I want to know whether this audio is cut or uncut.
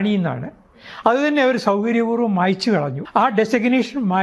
cut